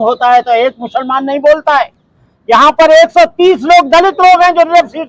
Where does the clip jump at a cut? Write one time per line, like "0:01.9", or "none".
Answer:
none